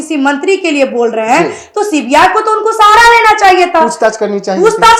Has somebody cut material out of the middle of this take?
no; 0 cuts

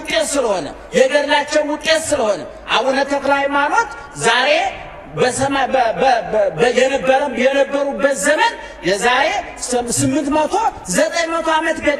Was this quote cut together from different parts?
no; 0 cuts

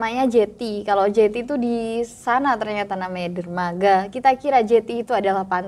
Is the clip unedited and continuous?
yes; 0 cuts

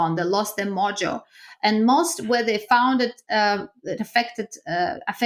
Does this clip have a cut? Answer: no; 0 cuts

